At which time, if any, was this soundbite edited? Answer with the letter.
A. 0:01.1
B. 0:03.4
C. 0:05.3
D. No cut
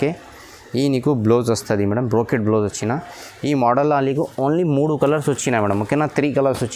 D